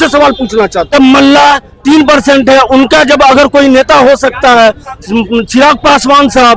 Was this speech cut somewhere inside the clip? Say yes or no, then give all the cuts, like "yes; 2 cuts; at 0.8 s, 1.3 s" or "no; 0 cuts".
yes; 1 cut; at 0.9 s